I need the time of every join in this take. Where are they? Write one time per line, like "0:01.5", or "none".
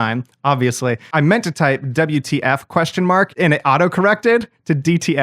0:01.1
0:03.3